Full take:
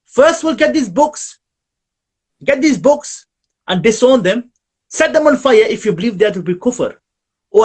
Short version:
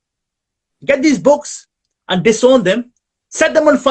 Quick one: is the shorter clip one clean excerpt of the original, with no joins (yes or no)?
yes